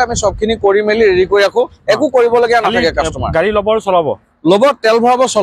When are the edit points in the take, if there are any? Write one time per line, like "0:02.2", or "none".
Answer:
none